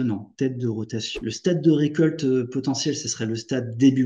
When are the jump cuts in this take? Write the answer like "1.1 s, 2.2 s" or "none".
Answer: 1.0 s